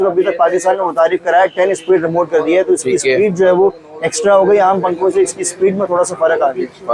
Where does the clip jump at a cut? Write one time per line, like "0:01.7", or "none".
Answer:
none